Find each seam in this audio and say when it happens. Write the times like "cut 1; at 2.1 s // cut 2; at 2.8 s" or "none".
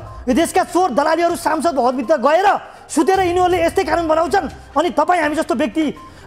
none

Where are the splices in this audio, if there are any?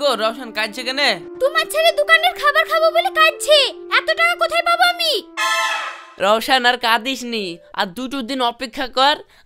none

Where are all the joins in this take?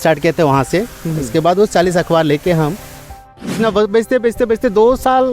cut 1; at 3.5 s

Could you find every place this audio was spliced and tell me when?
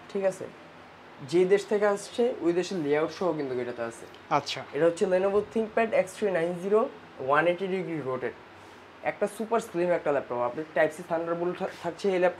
none

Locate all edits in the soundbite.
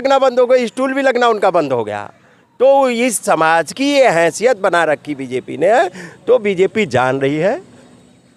none

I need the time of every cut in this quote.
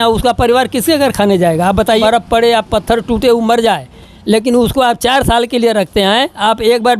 cut 1; at 2.0 s

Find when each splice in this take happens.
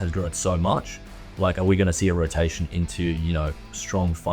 none

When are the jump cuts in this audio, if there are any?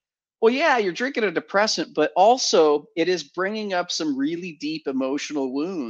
none

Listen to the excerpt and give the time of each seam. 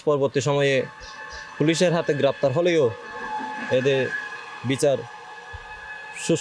none

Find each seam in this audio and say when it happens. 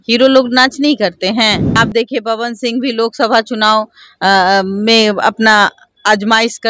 cut 1; at 1.6 s

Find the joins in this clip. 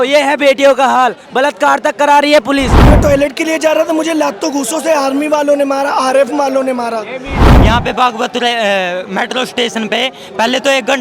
cut 1; at 2.8 s // cut 2; at 7.4 s

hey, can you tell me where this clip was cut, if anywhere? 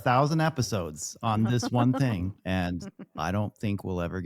cut 1; at 2.4 s

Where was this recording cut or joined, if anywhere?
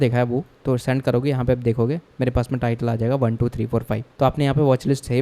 cut 1; at 4.0 s

